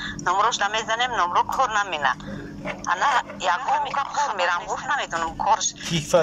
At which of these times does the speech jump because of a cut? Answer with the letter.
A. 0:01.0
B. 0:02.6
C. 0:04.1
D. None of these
C